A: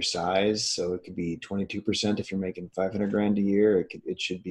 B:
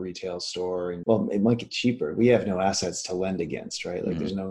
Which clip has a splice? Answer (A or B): B